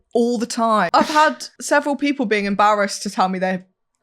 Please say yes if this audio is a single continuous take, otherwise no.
no